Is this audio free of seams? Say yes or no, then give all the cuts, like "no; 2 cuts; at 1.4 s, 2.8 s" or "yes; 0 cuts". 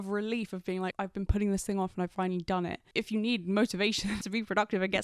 no; 2 cuts; at 0.9 s, 4.2 s